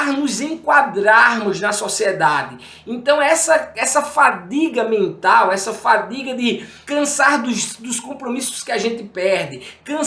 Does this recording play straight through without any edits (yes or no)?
yes